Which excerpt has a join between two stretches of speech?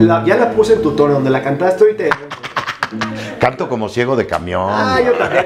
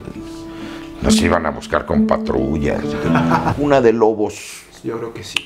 second; 1 cut; at 3.5 s

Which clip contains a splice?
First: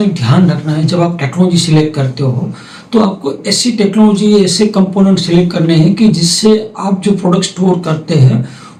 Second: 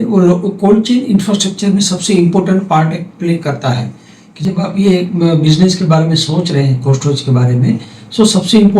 second; 1 cut; at 4.4 s

